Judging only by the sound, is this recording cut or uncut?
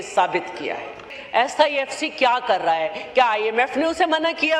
cut